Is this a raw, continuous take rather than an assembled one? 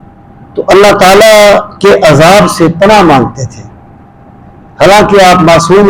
yes; 0 cuts

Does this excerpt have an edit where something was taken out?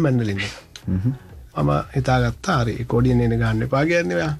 yes; 1 cut; at 1.5 s

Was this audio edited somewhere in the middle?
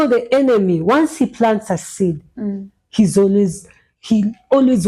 no; 0 cuts

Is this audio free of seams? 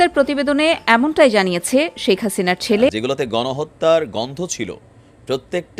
no; 1 cut; at 2.9 s

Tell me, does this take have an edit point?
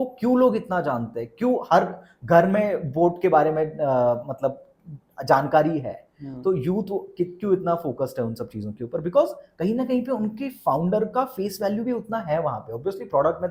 no; 0 cuts

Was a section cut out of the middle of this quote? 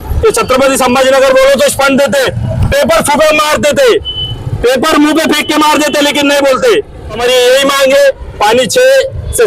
yes; 1 cut; at 7.2 s

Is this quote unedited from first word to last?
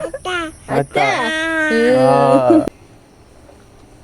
no; 1 cut; at 2.7 s

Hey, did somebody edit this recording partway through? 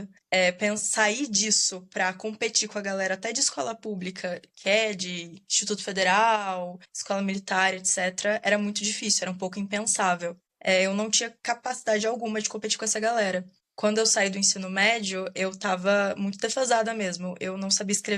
no; 0 cuts

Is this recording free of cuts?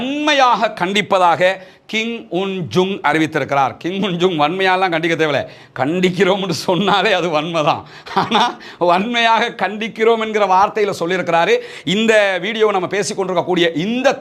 yes; 0 cuts

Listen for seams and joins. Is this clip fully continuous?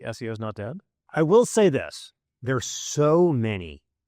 no; 1 cut; at 0.9 s

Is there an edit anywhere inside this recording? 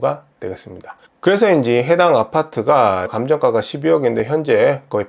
yes; 1 cut; at 3.2 s

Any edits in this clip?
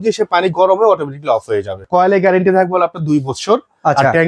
yes; 1 cut; at 1.7 s

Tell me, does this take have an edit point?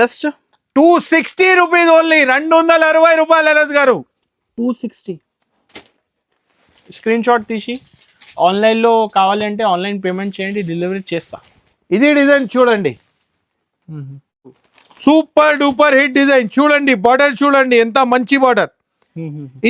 no; 0 cuts

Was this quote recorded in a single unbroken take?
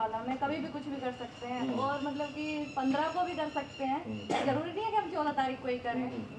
yes; 0 cuts

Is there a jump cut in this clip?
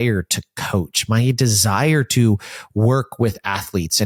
no; 0 cuts

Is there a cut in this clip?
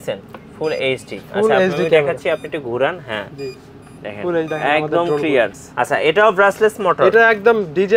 yes; 1 cut; at 5.6 s

